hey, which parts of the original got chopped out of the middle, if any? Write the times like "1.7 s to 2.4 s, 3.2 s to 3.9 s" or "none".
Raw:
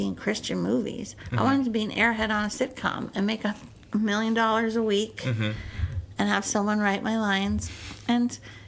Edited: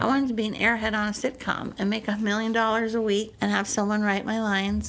3.6 s to 4.0 s, 5.1 s to 6.1 s